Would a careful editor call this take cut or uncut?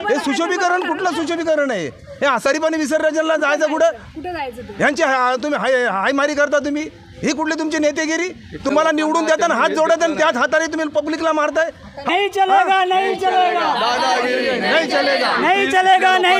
cut